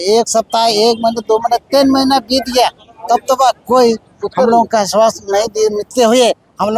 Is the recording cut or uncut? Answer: uncut